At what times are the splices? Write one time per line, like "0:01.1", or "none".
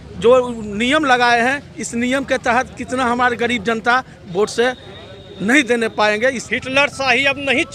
0:06.4